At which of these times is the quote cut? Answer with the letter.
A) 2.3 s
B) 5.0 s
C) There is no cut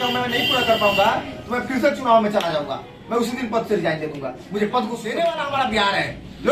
B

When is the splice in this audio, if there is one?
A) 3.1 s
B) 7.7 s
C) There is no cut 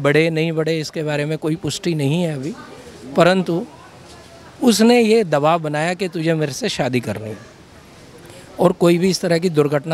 C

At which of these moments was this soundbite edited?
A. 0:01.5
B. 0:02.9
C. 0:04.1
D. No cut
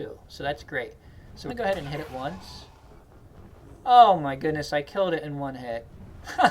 A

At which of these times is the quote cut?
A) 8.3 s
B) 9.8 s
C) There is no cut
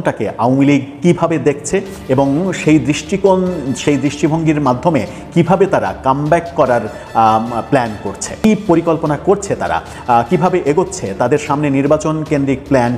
A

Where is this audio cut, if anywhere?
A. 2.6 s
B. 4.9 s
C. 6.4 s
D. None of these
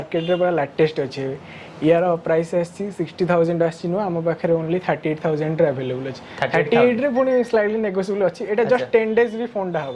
D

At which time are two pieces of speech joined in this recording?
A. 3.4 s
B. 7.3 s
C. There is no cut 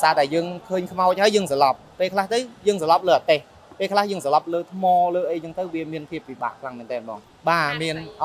B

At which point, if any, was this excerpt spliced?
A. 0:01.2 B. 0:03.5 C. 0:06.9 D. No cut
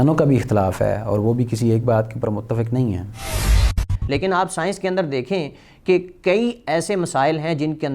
B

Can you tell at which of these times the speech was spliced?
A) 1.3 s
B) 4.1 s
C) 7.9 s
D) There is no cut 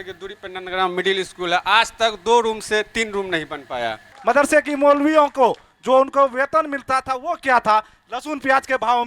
B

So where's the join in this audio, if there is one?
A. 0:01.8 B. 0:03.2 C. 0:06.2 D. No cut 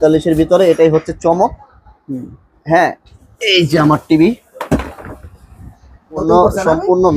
C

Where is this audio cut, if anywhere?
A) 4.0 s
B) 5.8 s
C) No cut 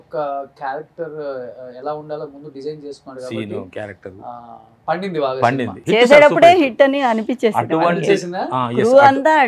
B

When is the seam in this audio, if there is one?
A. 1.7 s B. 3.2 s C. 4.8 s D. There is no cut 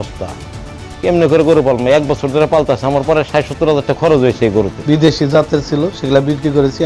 C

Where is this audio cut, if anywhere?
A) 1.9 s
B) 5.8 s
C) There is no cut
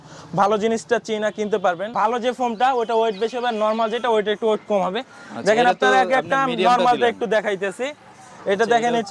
A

